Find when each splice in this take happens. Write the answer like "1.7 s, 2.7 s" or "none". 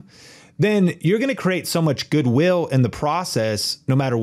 none